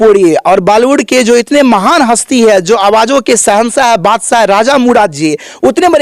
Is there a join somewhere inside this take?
no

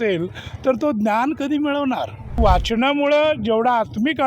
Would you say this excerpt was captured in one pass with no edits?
no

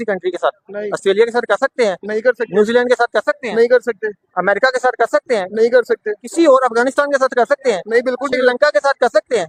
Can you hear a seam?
no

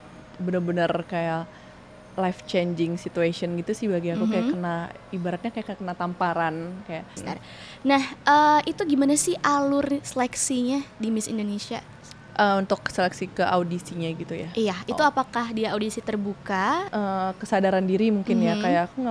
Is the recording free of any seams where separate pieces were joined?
no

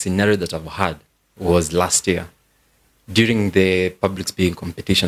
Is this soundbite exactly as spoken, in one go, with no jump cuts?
yes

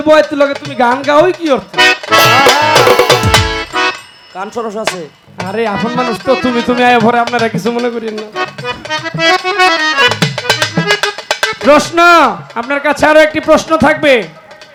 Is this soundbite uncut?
yes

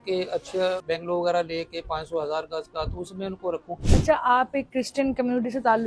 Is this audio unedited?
no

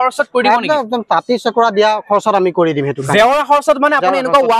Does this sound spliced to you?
no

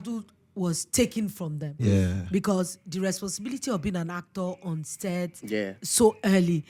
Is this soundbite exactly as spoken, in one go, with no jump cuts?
yes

